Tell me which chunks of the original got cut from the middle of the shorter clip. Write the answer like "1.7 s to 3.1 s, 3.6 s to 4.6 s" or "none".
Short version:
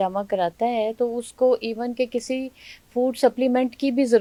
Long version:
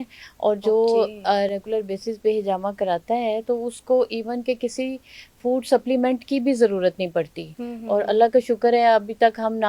none

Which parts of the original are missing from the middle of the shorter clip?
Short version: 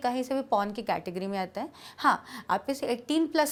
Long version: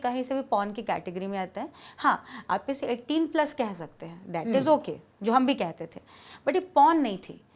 none

